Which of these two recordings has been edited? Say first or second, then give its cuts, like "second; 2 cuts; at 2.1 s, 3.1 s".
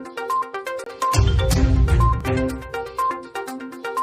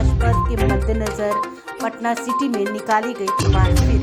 first; 1 cut; at 2.1 s